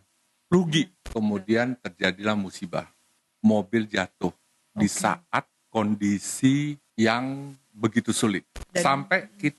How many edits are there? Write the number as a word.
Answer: four